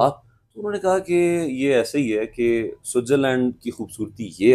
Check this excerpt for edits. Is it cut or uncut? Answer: uncut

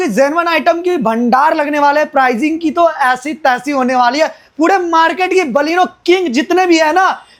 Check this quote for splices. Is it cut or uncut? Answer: uncut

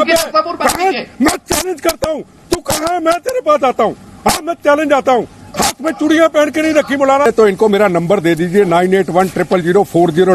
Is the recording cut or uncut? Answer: cut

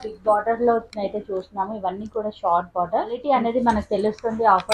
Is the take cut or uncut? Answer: cut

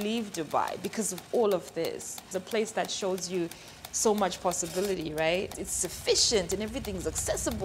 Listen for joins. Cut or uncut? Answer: cut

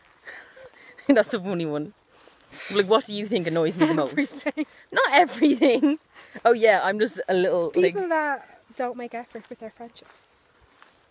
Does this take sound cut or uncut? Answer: uncut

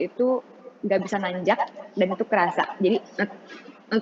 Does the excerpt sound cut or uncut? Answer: uncut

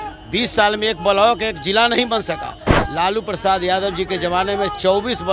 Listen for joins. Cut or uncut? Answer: uncut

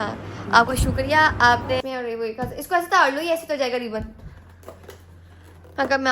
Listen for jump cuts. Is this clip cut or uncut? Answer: cut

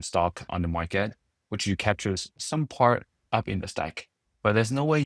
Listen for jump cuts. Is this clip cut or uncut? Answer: uncut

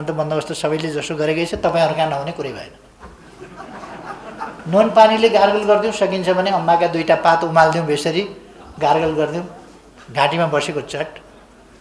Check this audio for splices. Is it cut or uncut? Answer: cut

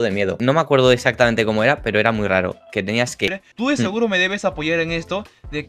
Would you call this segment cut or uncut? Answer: cut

